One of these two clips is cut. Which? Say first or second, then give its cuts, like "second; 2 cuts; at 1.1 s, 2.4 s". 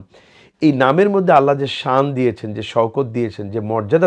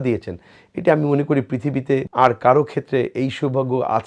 second; 1 cut; at 2.0 s